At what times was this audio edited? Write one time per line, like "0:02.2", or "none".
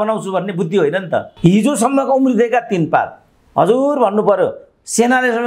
0:01.3